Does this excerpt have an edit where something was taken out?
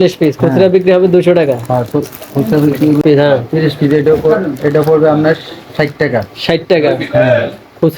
yes; 1 cut; at 3.0 s

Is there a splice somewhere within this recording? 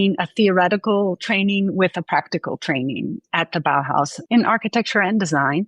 no; 0 cuts

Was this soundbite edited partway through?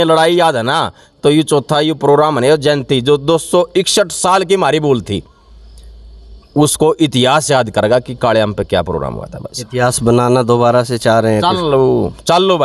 no; 0 cuts

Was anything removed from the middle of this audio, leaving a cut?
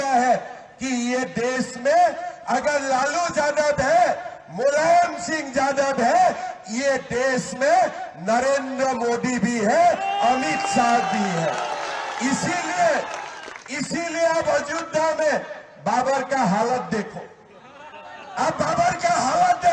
no; 0 cuts

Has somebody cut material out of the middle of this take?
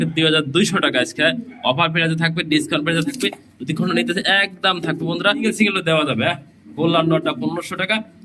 yes; 1 cut; at 5.4 s

